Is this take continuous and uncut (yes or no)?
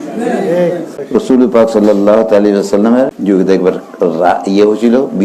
no